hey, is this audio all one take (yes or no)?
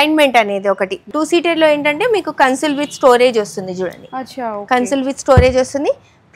no